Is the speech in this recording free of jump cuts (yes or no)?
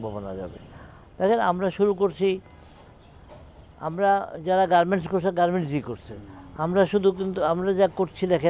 yes